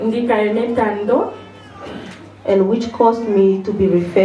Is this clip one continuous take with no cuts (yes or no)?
yes